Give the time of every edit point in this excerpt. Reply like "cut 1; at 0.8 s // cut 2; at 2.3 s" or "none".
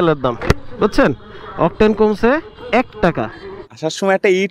cut 1; at 3.4 s